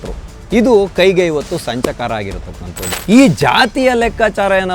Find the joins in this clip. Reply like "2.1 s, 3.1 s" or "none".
2.9 s